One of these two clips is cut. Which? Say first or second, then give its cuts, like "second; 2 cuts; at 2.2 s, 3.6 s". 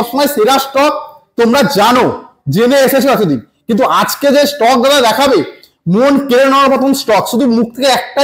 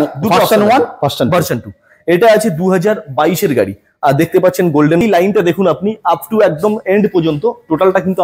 second; 1 cut; at 5.0 s